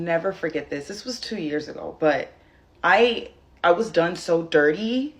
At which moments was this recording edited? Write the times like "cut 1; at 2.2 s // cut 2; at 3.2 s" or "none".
none